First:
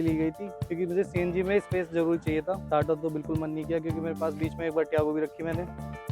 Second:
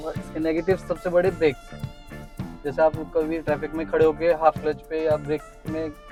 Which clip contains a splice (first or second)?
first